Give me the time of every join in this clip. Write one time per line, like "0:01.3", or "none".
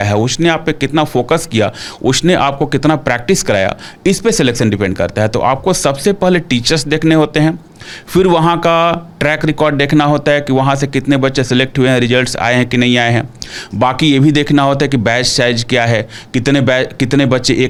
none